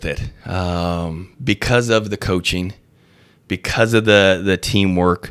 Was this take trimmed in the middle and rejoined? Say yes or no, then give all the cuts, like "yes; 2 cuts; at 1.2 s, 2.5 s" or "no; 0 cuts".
no; 0 cuts